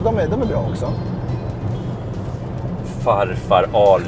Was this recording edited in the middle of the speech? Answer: no; 0 cuts

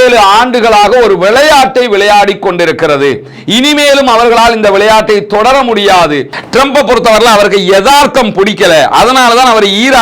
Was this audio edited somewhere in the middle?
yes; 1 cut; at 6.4 s

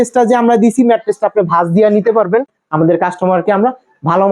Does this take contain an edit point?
yes; 1 cut; at 2.6 s

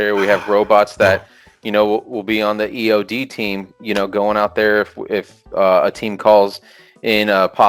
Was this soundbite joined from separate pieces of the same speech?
no; 0 cuts

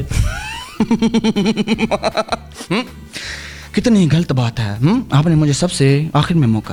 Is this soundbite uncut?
yes; 0 cuts

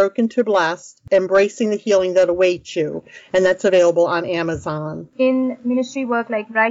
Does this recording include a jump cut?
yes; 1 cut; at 0.9 s

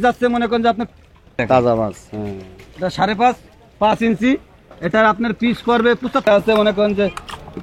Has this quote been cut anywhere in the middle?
yes; 2 cuts; at 1.4 s, 6.3 s

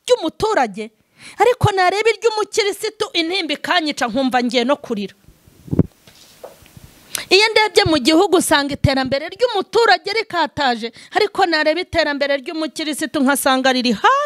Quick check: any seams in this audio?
no; 0 cuts

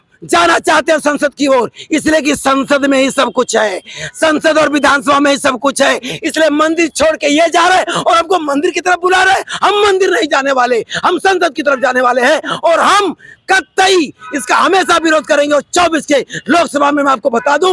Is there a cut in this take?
no; 0 cuts

